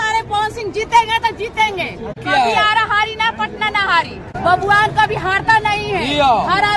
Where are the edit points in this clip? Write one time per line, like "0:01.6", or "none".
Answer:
0:02.1
0:04.2

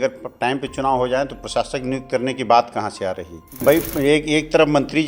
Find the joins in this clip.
0:03.6

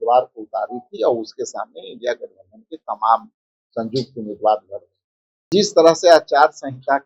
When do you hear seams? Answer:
0:05.5

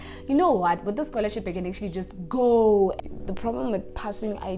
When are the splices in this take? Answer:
0:03.0

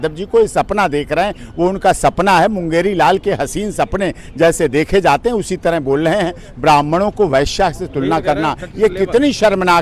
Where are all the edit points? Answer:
none

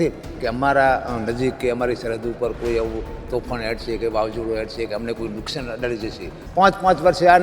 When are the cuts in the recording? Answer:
0:06.4

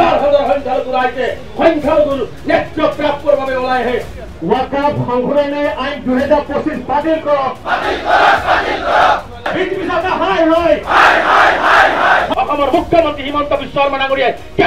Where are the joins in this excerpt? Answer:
0:04.1
0:09.5
0:12.3

